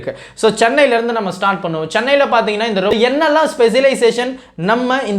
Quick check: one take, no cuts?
no; 1 cut; at 2.9 s

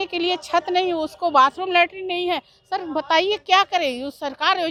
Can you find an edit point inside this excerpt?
no; 0 cuts

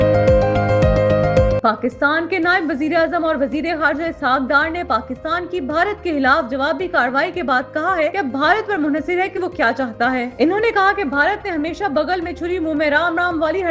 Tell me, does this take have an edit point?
yes; 1 cut; at 1.6 s

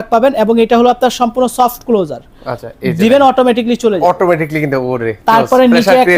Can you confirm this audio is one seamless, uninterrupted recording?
yes; 0 cuts

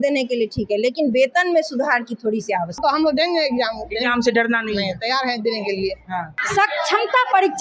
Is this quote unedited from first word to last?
no; 2 cuts; at 2.8 s, 6.4 s

